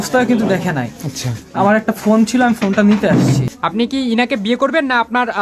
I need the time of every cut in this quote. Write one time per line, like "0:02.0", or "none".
0:03.5